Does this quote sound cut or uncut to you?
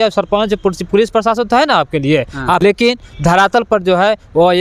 cut